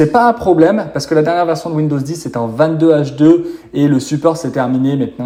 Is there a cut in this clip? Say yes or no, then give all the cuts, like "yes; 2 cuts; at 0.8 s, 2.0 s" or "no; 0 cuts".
no; 0 cuts